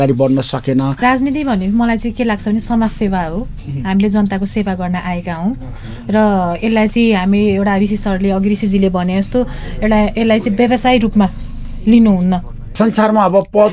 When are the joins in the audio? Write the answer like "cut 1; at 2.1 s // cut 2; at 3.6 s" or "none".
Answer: cut 1; at 1.0 s // cut 2; at 12.6 s